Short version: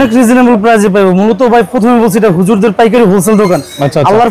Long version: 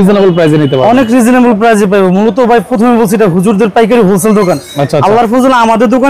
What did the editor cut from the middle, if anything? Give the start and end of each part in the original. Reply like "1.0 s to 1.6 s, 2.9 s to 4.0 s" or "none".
none